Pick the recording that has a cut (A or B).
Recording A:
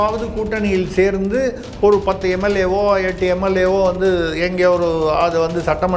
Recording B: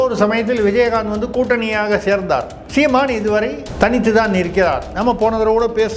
B